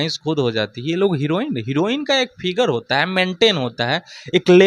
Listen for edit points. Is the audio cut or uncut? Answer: uncut